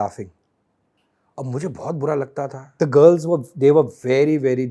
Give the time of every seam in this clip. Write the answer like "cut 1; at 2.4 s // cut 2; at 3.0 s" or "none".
cut 1; at 2.6 s